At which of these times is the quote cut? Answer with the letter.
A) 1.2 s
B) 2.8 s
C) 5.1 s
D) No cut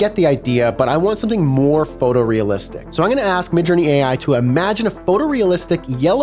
B